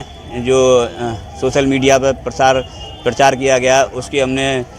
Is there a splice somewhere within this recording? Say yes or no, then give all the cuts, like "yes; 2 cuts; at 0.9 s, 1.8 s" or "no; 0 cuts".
no; 0 cuts